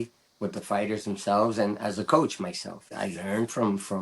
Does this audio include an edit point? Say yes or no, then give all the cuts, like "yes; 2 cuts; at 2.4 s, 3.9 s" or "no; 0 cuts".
yes; 1 cut; at 2.9 s